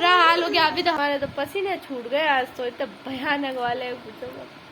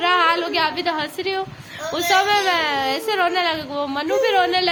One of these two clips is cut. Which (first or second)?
first